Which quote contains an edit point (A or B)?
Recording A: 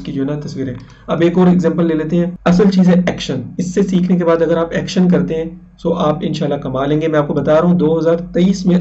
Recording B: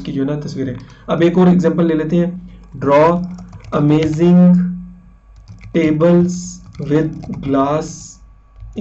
A